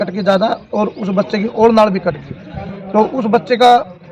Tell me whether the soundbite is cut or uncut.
uncut